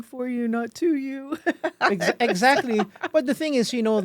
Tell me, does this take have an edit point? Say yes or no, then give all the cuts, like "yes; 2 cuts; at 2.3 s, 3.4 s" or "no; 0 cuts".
no; 0 cuts